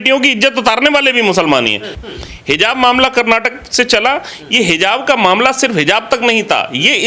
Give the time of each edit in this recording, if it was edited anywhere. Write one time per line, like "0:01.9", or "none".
0:01.9

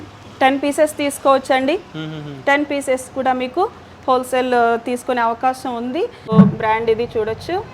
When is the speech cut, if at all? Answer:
0:06.3

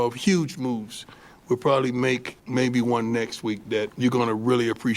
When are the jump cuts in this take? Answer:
0:02.4
0:03.9

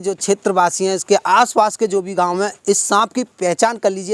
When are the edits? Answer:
none

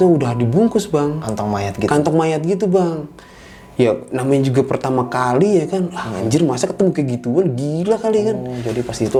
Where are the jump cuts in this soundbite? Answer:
none

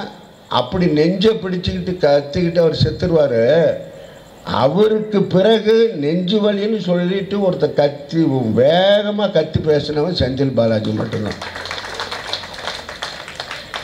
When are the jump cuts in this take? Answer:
none

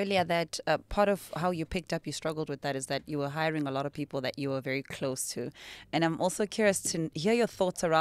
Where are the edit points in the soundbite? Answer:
none

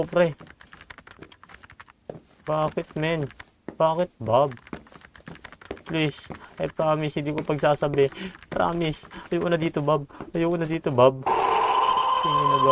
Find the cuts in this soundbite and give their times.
none

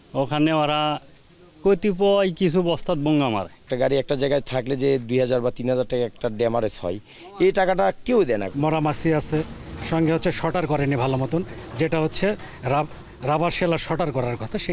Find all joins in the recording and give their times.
0:03.6
0:08.5

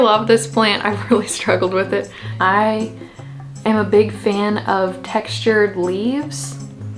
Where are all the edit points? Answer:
0:02.3

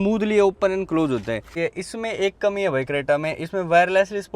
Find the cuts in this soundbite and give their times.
0:01.5

